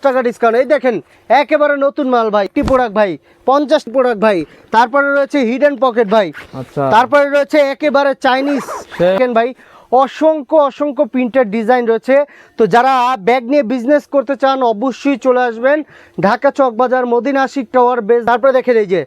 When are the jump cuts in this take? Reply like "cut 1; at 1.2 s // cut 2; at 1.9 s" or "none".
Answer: cut 1; at 2.5 s // cut 2; at 3.9 s // cut 3; at 9.2 s // cut 4; at 18.2 s

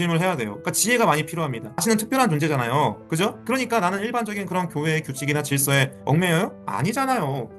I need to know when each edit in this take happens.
cut 1; at 1.8 s

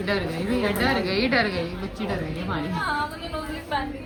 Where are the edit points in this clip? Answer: none

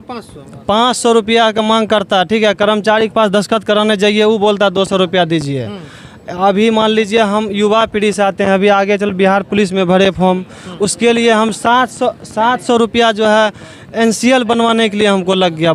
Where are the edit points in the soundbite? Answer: none

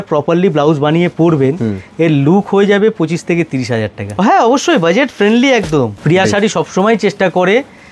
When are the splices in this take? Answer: cut 1; at 4.1 s // cut 2; at 5.9 s

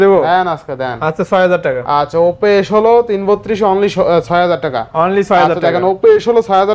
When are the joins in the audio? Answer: none

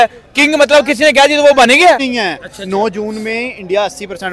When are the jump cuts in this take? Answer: cut 1; at 2.1 s

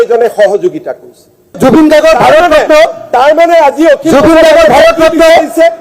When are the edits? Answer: cut 1; at 1.6 s

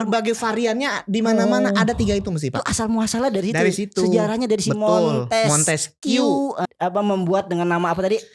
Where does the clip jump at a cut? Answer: cut 1; at 6.6 s

